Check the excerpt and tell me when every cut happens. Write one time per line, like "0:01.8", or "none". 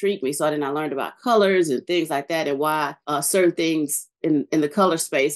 0:03.0